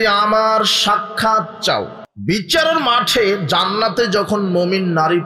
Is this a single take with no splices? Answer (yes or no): no